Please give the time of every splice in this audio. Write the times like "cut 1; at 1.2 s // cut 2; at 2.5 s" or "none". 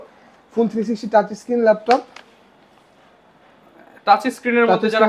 none